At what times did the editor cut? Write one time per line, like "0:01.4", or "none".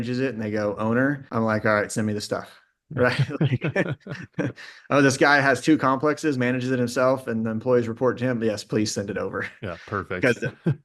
0:01.2